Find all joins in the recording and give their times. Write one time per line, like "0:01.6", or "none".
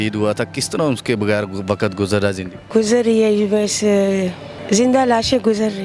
0:02.5
0:04.5